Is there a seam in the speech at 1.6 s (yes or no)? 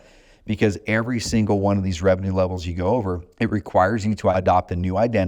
no